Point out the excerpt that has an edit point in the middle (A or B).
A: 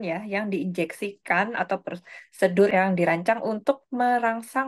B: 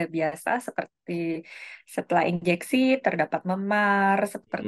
A